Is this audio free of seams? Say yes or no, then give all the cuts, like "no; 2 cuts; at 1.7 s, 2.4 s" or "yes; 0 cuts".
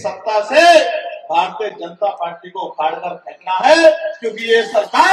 yes; 0 cuts